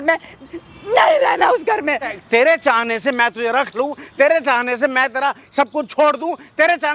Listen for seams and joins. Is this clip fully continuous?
no; 1 cut; at 2.2 s

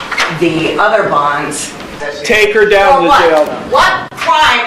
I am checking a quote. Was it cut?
yes; 1 cut; at 2.1 s

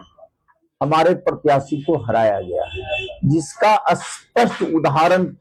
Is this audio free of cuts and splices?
yes; 0 cuts

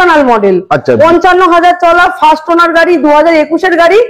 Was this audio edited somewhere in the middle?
no; 0 cuts

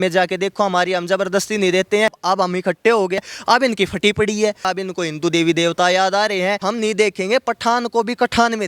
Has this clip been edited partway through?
yes; 4 cuts; at 2.2 s, 3.2 s, 4.7 s, 6.6 s

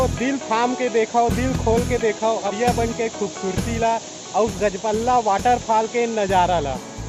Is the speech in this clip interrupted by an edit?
no; 0 cuts

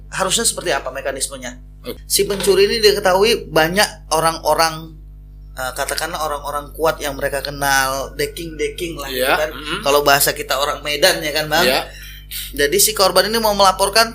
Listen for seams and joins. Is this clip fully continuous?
no; 1 cut; at 1.8 s

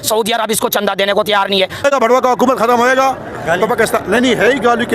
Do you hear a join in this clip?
yes; 1 cut; at 1.8 s

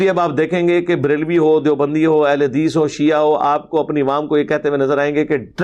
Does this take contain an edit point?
no; 0 cuts

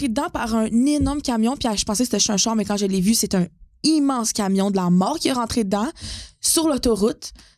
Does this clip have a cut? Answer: no; 0 cuts

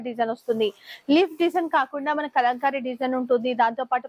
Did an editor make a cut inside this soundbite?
no; 0 cuts

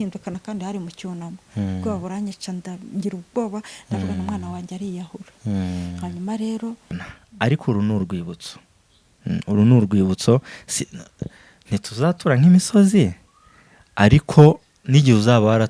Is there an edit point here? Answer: yes; 1 cut; at 6.8 s

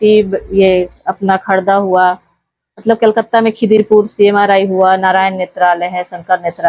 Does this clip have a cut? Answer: no; 0 cuts

